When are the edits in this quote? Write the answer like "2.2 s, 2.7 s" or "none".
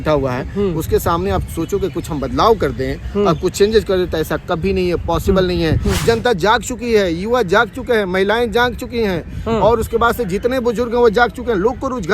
5.9 s